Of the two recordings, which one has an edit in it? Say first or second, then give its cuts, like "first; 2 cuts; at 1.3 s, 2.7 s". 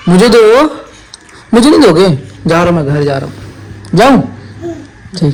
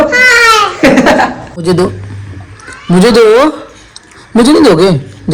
second; 1 cut; at 1.6 s